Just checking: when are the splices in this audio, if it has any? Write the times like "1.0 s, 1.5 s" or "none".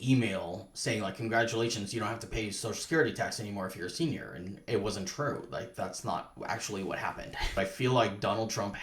7.6 s